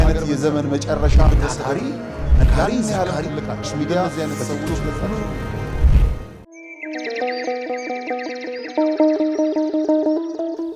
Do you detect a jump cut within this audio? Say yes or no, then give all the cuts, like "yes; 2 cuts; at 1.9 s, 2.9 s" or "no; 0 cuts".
yes; 1 cut; at 6.3 s